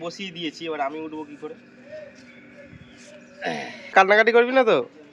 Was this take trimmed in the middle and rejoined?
yes; 1 cut; at 3.9 s

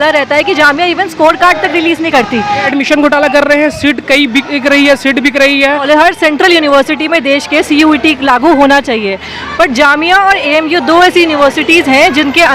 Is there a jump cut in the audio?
yes; 2 cuts; at 2.7 s, 5.8 s

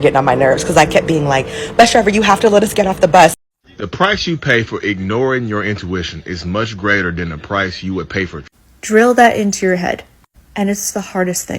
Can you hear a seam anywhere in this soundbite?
yes; 1 cut; at 3.3 s

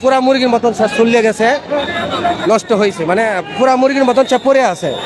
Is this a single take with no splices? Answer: yes; 0 cuts

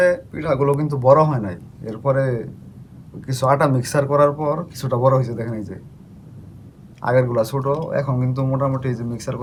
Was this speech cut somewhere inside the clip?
no; 0 cuts

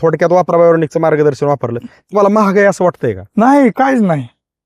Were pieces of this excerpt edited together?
no; 0 cuts

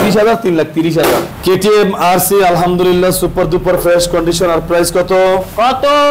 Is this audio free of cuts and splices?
no; 1 cut; at 1.3 s

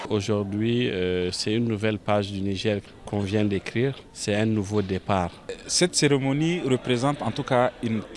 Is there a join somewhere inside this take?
yes; 3 cuts; at 2.9 s, 4.1 s, 5.6 s

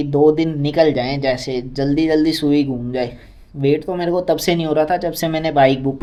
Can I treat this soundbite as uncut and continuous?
yes; 0 cuts

